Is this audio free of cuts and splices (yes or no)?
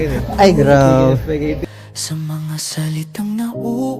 no